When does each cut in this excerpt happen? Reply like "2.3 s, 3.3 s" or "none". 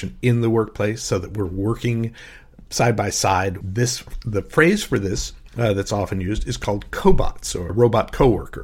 3.6 s, 7.7 s